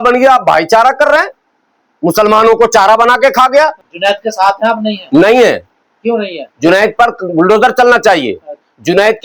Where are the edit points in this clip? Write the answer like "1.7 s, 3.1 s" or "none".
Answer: 3.9 s